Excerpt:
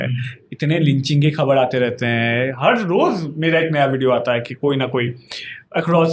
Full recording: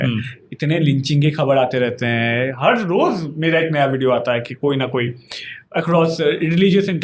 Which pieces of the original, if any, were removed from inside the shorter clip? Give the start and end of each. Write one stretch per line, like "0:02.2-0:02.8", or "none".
none

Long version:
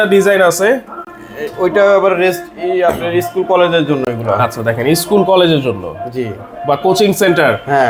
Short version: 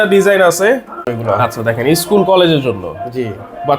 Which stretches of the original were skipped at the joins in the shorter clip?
0:01.1-0:04.1

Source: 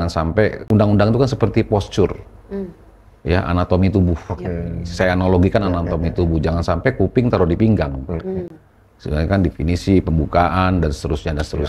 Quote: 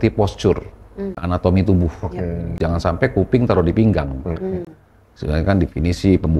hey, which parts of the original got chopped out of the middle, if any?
0:02.8-0:03.5
0:04.9-0:06.4

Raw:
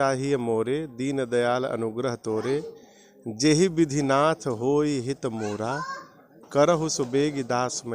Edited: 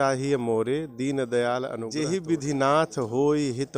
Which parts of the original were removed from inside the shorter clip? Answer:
0:01.8-0:03.3

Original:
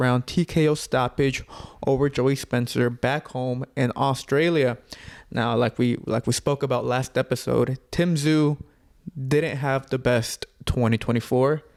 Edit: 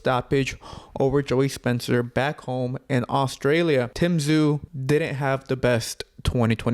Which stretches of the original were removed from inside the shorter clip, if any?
0:04.8-0:07.9
0:08.7-0:09.1

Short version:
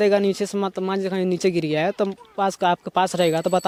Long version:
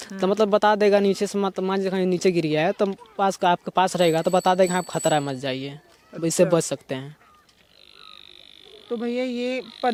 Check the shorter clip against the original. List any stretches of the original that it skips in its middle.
none

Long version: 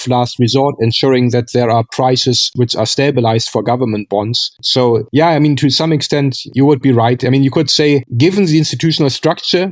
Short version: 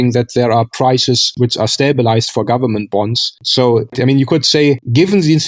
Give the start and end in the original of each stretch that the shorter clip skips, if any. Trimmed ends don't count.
0:05.1-0:07.2

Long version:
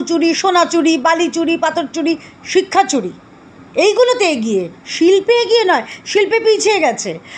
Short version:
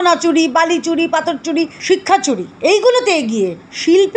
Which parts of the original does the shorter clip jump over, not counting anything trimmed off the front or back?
0:02.3-0:02.4
0:03.1-0:03.6

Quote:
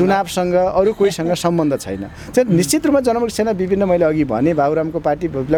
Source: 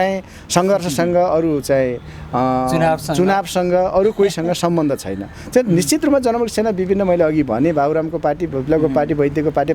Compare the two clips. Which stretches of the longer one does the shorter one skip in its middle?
none

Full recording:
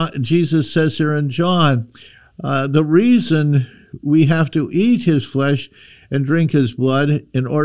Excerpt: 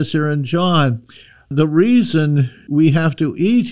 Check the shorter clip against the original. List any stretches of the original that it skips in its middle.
0:02.4-0:02.7
0:03.7-0:03.9

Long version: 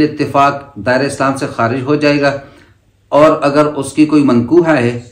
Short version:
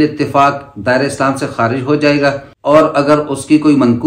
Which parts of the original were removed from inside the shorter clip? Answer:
0:02.5-0:03.0

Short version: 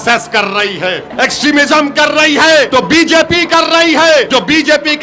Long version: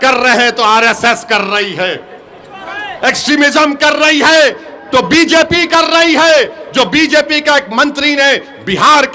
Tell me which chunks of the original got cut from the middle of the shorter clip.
0:02.0-0:02.9
0:04.5-0:04.9
0:06.5-0:06.7

